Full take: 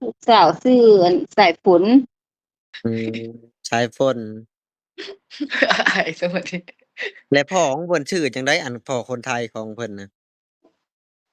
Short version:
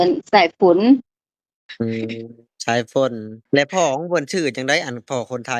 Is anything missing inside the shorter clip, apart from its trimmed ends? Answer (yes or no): yes